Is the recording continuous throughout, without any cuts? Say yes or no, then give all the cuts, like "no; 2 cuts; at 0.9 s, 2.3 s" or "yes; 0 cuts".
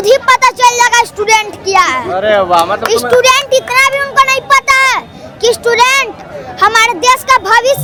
yes; 0 cuts